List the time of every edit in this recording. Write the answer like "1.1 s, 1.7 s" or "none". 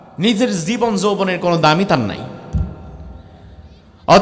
none